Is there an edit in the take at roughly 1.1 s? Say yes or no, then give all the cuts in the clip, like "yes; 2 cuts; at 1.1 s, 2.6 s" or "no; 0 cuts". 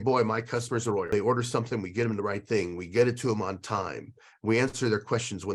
yes; 1 cut; at 1.1 s